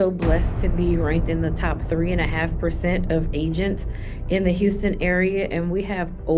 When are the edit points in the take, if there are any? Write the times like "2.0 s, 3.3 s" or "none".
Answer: none